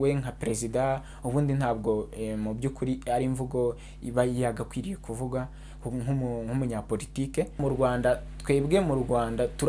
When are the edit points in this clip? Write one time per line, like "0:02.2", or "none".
0:07.6